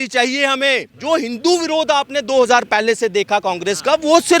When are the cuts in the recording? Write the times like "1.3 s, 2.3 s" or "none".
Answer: 0.9 s